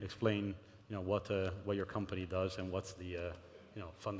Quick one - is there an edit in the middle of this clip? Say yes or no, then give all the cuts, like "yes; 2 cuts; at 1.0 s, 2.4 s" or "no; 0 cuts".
no; 0 cuts